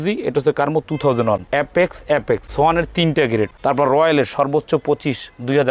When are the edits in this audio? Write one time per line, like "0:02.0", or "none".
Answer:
0:01.5
0:02.5
0:03.5